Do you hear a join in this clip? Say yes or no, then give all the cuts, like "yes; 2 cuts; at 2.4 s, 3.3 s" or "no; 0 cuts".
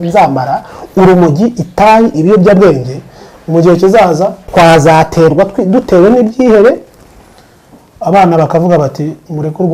yes; 1 cut; at 4.4 s